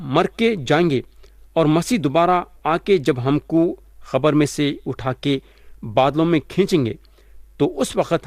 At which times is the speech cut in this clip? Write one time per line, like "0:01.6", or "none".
none